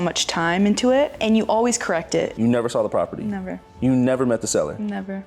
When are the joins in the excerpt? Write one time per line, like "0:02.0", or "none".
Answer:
0:01.2
0:02.3